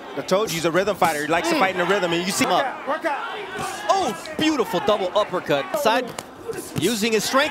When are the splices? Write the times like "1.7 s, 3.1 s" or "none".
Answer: 2.4 s, 5.7 s